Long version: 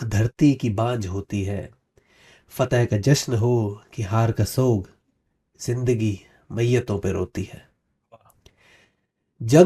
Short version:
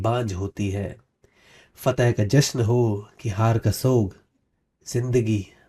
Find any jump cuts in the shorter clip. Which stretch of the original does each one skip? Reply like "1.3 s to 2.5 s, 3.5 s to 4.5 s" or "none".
none